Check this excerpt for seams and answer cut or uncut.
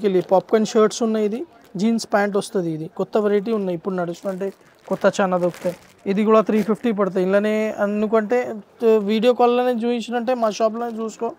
uncut